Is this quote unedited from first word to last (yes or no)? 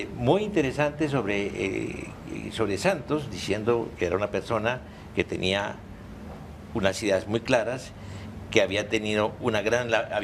no